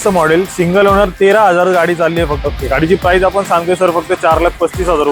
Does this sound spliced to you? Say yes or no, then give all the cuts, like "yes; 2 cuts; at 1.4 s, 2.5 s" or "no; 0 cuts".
yes; 1 cut; at 2.4 s